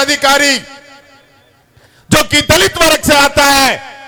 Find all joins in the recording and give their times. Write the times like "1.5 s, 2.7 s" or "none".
none

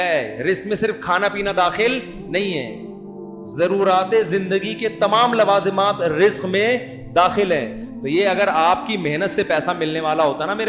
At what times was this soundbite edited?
7.8 s

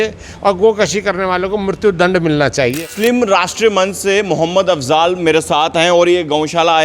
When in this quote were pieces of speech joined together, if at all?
2.8 s

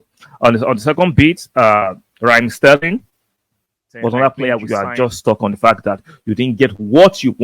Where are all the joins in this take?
4.6 s

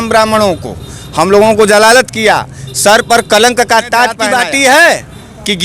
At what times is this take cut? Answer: 4.2 s

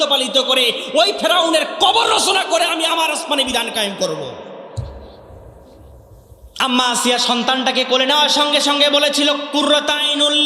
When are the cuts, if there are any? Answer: 6.4 s

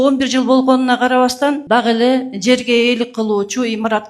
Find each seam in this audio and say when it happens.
1.6 s

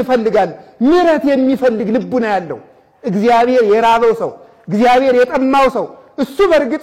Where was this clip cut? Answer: none

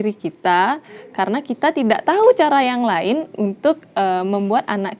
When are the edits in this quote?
none

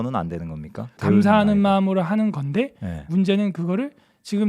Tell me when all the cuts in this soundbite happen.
1.0 s

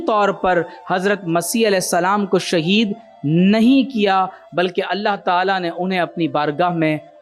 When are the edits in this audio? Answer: none

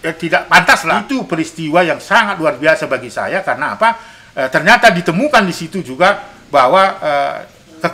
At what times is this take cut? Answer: 1.0 s

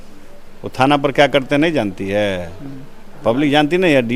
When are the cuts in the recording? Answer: none

